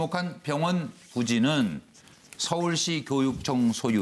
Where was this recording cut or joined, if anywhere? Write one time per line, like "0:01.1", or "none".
0:02.7